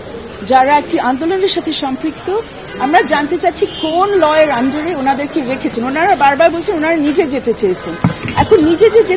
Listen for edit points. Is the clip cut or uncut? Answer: cut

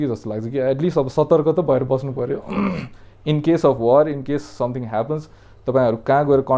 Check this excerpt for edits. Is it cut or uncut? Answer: uncut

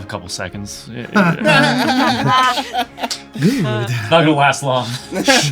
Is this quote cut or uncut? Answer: uncut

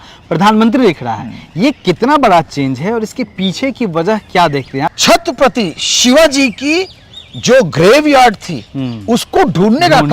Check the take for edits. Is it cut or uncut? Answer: cut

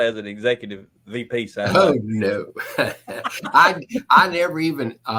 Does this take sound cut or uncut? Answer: uncut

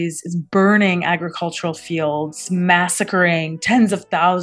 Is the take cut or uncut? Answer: cut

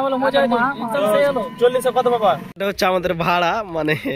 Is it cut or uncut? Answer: cut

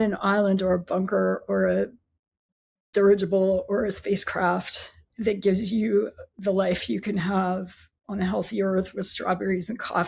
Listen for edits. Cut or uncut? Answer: cut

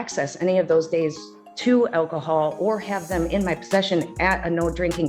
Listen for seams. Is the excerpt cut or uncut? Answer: uncut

